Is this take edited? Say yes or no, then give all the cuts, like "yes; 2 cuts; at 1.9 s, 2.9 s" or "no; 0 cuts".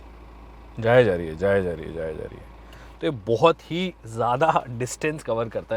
no; 0 cuts